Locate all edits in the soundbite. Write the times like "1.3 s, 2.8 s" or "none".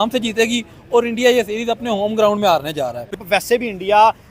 3.2 s